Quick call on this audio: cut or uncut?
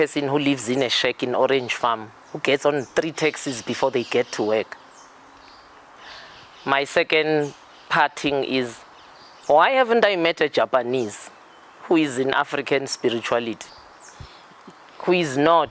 uncut